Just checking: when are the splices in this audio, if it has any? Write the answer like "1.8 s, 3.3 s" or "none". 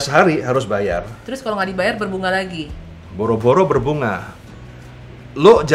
none

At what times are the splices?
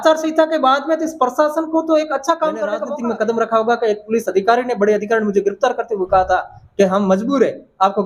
2.9 s

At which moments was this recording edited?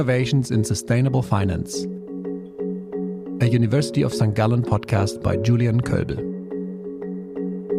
none

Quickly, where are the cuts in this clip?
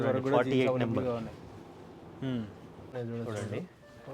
2.9 s

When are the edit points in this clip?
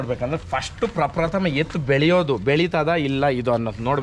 none

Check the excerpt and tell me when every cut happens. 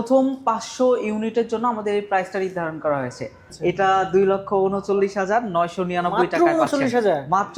3.4 s

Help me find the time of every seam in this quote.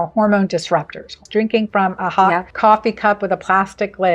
1.2 s, 2.5 s

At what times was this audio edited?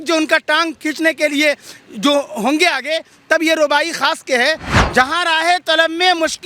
4.7 s

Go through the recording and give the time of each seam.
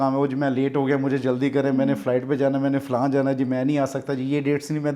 none

